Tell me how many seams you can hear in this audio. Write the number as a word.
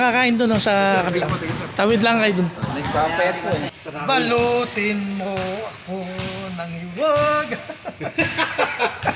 one